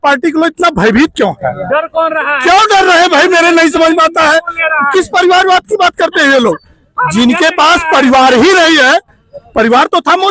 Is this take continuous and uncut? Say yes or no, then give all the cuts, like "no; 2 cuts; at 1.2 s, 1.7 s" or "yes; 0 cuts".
yes; 0 cuts